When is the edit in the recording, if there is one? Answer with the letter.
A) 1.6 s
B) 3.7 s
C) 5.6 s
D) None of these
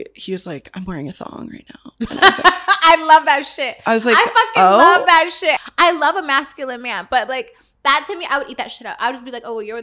C